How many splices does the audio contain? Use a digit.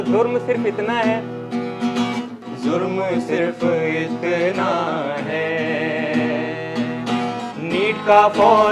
1